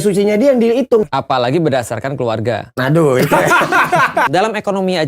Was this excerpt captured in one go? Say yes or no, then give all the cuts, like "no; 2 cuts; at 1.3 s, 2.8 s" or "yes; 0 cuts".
no; 3 cuts; at 1.1 s, 2.7 s, 4.3 s